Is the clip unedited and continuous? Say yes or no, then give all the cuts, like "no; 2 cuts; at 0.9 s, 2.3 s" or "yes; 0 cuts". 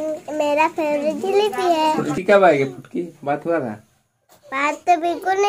no; 1 cut; at 2.1 s